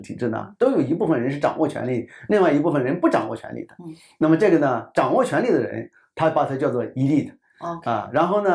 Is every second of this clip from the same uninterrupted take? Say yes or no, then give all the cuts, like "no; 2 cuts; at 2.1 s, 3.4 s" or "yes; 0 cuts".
yes; 0 cuts